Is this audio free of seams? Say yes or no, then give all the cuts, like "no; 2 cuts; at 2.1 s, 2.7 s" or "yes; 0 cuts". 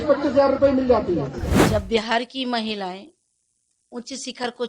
no; 1 cut; at 1.6 s